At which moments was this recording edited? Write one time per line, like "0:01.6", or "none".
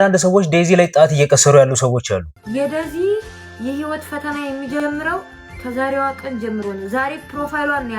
0:02.4